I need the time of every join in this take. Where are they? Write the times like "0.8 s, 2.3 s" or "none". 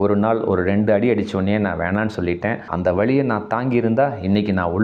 2.7 s